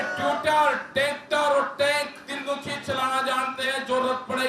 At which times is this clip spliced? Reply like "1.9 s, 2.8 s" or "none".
none

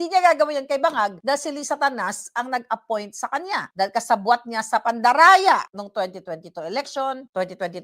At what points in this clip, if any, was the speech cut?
1.2 s, 3.7 s

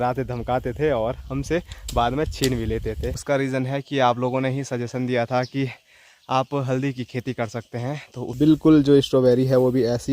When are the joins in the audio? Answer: 3.2 s, 8.3 s

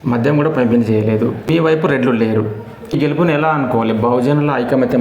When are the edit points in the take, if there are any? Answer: 1.5 s, 3.0 s

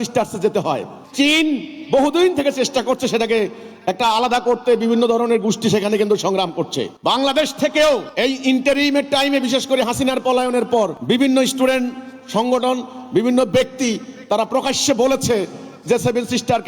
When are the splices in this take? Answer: 1.0 s, 6.9 s, 8.1 s, 11.0 s

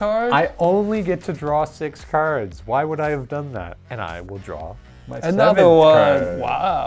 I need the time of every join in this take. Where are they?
none

